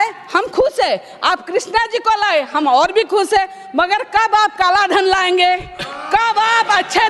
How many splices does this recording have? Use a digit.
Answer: 0